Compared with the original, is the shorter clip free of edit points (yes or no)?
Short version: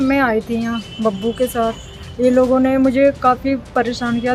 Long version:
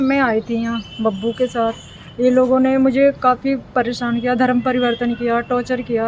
yes